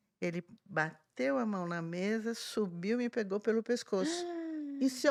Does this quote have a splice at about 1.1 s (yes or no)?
no